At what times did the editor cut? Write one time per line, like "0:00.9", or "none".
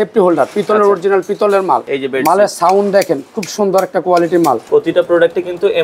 0:01.9
0:04.6